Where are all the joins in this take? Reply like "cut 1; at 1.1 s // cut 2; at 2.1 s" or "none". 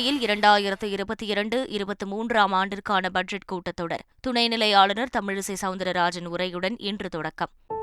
cut 1; at 4.1 s